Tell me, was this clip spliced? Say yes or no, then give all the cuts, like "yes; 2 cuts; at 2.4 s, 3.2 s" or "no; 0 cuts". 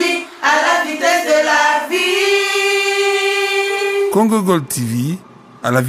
no; 0 cuts